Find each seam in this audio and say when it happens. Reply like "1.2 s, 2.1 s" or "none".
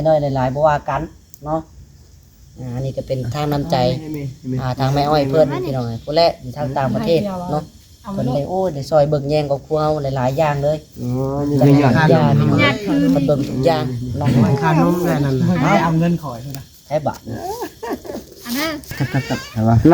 18.9 s